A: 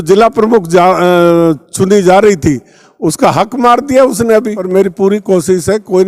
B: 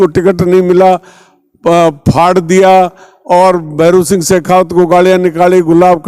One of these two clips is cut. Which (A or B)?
A